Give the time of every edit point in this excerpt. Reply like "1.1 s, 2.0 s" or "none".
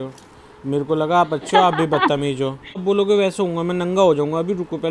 2.8 s